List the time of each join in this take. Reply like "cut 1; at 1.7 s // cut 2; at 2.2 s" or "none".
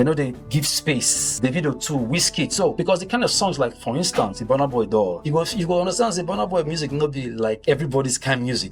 cut 1; at 1.2 s // cut 2; at 2.7 s // cut 3; at 5.2 s // cut 4; at 7.6 s